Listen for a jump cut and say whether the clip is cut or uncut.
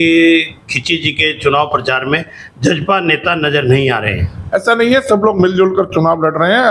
uncut